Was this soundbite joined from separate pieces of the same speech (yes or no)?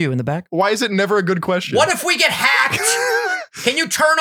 no